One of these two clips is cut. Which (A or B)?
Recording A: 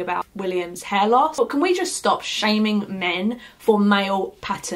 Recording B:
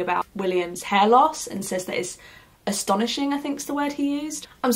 A